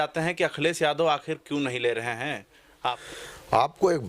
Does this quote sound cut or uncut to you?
cut